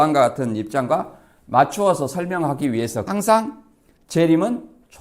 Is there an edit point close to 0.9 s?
no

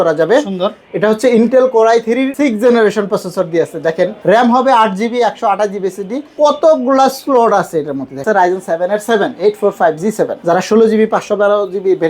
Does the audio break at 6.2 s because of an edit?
yes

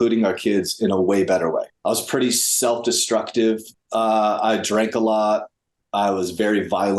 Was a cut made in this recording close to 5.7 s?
no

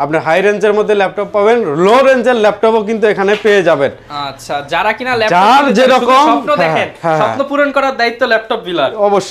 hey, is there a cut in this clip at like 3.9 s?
no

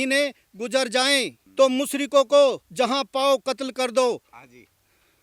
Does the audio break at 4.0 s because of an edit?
no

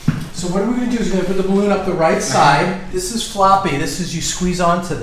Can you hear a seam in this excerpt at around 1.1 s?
no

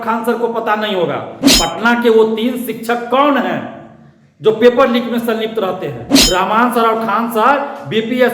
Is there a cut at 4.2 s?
no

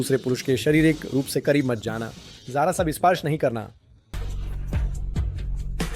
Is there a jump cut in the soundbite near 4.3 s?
yes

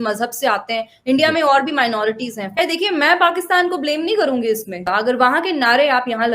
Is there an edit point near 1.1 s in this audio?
no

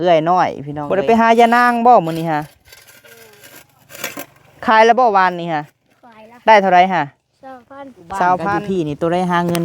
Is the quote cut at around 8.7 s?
yes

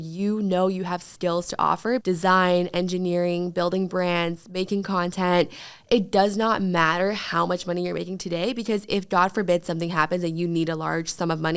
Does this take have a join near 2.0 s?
yes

